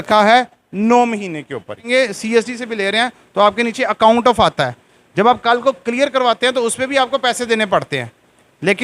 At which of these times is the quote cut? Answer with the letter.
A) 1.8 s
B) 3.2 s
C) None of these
A